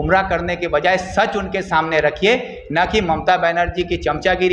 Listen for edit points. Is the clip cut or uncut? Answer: uncut